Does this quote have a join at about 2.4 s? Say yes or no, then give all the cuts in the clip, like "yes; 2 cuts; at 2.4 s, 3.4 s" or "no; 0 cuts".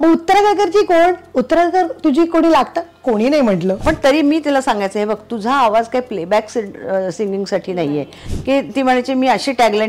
no; 2 cuts; at 3.8 s, 8.2 s